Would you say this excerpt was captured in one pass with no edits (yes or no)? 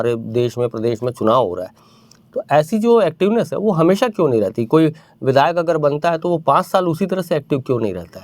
yes